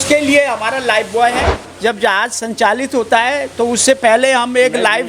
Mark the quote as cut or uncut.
cut